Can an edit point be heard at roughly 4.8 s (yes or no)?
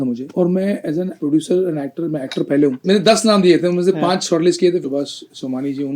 yes